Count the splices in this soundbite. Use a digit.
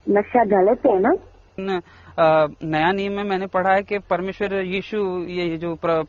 1